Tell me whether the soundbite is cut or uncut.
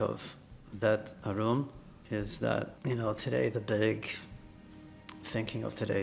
cut